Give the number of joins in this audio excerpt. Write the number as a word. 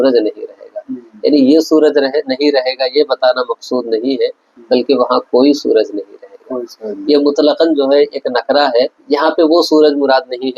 one